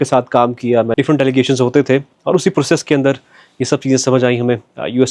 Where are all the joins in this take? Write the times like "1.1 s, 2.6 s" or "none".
0.9 s